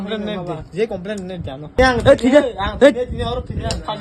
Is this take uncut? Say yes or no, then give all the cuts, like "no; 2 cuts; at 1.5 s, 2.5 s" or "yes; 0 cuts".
no; 1 cut; at 1.7 s